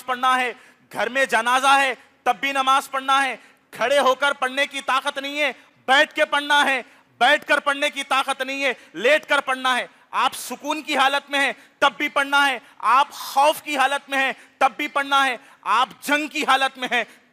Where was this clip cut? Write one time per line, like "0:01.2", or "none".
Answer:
none